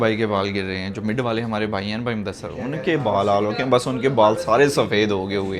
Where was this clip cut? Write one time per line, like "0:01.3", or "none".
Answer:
none